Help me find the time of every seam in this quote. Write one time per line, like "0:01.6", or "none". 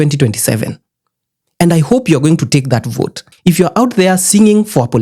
0:03.4